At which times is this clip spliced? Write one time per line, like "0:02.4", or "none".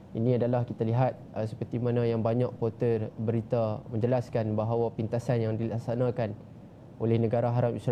none